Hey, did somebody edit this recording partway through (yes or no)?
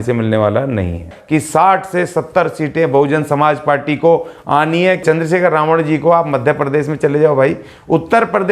yes